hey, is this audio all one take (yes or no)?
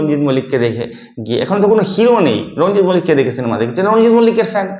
yes